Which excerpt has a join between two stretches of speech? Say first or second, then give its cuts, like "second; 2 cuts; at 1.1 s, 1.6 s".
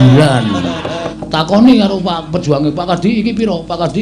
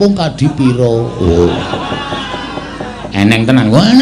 first; 1 cut; at 1.1 s